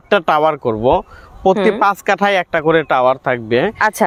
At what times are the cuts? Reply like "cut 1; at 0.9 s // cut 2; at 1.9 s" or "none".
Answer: none